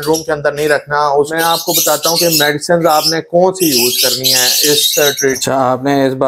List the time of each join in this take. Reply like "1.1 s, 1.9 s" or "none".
1.3 s, 5.4 s